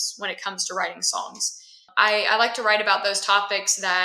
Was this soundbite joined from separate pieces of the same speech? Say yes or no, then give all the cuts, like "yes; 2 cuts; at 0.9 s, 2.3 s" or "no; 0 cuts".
yes; 1 cut; at 1.8 s